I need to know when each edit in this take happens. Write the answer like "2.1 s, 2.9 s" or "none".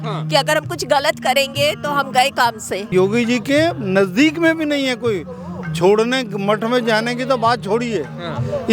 2.9 s